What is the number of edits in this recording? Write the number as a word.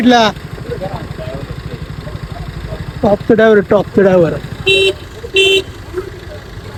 zero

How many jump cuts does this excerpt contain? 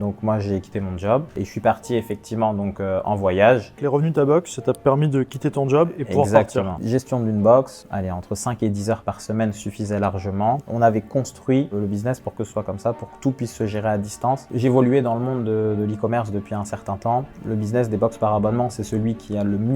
six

